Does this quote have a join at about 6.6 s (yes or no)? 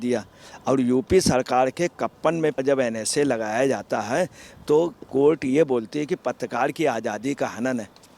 no